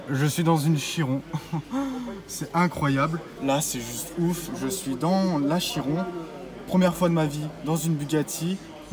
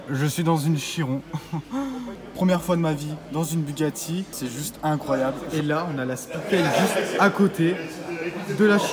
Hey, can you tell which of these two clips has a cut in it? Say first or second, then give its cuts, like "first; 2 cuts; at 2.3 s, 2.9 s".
second; 3 cuts; at 2.2 s, 4.4 s, 5.4 s